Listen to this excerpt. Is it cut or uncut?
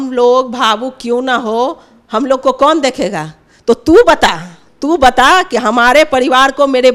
uncut